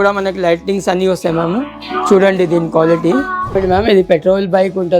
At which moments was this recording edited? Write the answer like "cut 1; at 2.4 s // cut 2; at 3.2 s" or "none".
cut 1; at 3.6 s